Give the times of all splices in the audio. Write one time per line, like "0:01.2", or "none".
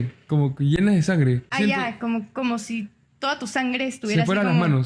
0:01.5

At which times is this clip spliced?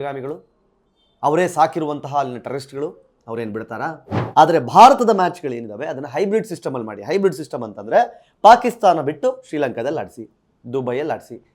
0:04.1

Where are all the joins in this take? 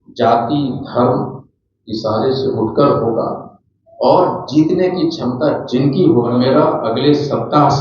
0:06.3

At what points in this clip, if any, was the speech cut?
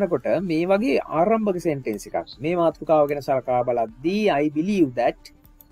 none

